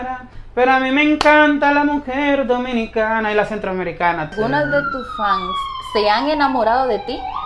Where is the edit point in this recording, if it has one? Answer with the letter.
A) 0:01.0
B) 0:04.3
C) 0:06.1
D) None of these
B